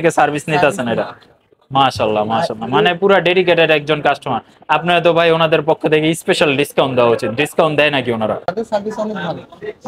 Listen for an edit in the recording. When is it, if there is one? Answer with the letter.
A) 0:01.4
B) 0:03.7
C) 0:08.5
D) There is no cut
C